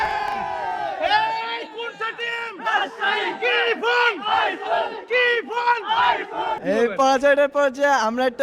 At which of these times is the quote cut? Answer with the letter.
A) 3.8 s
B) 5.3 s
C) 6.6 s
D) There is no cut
C